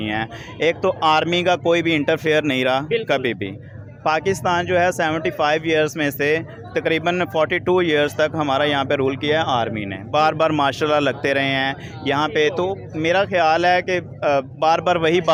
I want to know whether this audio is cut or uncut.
uncut